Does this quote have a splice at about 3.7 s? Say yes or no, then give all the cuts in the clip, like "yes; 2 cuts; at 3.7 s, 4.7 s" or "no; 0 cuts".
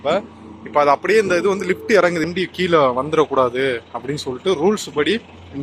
no; 1 cut; at 2.3 s